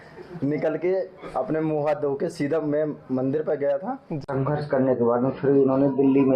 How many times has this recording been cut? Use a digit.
1